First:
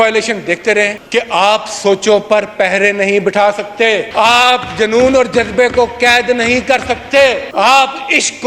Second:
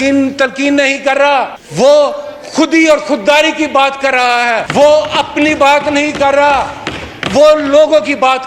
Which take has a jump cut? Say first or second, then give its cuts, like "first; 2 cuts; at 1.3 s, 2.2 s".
first; 1 cut; at 1.0 s